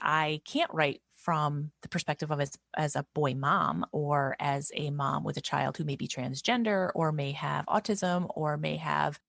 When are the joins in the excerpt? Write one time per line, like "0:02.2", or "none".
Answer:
none

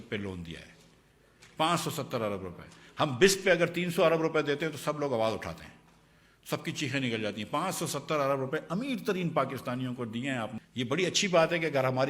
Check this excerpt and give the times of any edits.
0:10.6

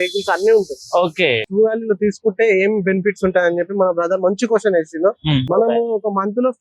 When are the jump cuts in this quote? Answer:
0:01.5
0:05.5

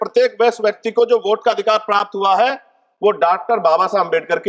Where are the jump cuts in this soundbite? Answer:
none

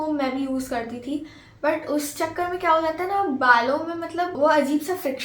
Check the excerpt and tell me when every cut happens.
0:04.3

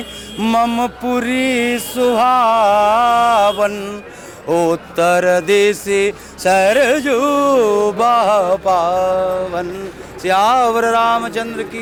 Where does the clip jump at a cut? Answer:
none

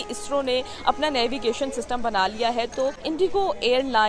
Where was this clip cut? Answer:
none

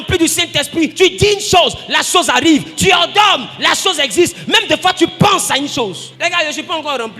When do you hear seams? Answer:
0:00.9
0:06.1

